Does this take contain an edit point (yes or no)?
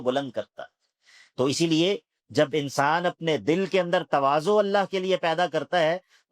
no